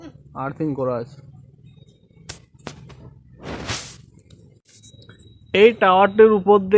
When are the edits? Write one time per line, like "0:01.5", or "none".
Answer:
none